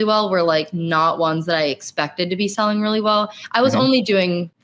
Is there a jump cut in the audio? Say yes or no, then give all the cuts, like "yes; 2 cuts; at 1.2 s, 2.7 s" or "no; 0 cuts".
no; 0 cuts